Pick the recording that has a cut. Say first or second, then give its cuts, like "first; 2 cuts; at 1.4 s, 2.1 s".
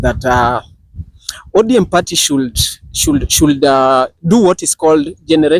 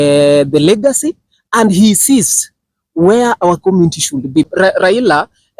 second; 1 cut; at 4.5 s